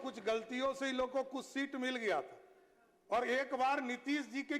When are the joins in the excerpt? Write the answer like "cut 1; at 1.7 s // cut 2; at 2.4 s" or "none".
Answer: none